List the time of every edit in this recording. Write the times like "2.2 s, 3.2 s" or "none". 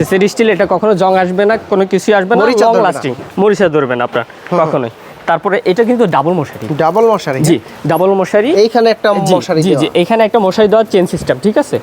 none